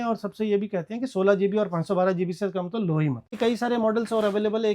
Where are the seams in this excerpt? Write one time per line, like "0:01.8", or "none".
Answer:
0:03.3

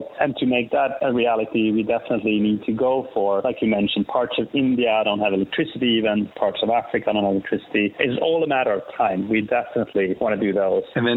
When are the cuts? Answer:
none

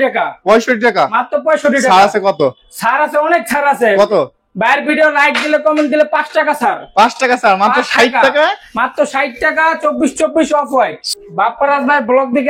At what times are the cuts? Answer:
0:11.1

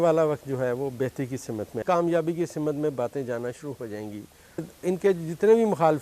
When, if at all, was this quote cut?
0:01.8
0:04.6

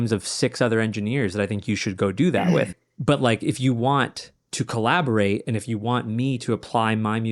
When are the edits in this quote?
0:02.8

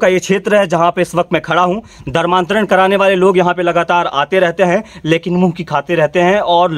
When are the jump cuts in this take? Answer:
none

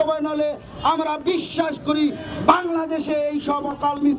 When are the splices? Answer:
none

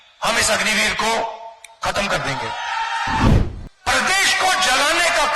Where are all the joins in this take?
0:03.3

